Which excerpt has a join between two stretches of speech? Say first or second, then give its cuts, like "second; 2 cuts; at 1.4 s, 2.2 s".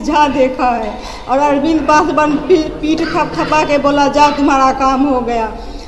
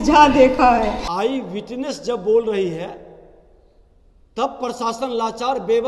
second; 1 cut; at 1.0 s